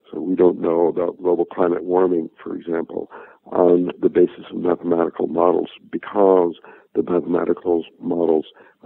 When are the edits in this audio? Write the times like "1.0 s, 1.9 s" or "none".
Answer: none